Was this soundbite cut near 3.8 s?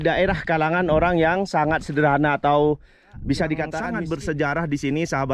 yes; 1 cut; at 3.8 s

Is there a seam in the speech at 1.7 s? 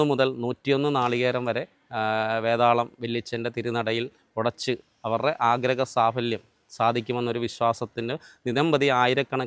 no; 0 cuts

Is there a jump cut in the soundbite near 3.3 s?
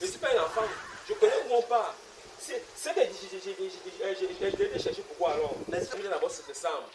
no; 1 cut; at 5.9 s

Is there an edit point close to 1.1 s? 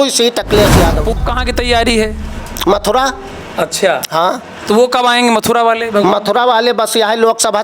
yes; 1 cut; at 1.1 s

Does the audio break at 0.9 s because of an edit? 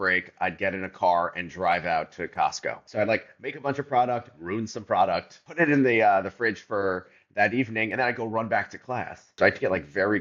no; 3 cuts; at 2.8 s, 5.4 s, 9.4 s

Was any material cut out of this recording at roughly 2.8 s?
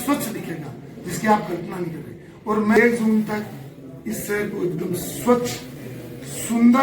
yes; 1 cut; at 2.8 s

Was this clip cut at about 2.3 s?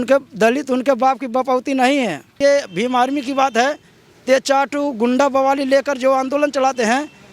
yes; 1 cut; at 2.3 s

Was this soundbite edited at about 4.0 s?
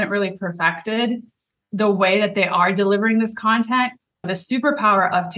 no; 0 cuts

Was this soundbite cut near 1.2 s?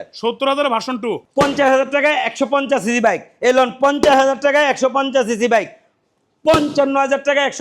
yes; 1 cut; at 1.2 s

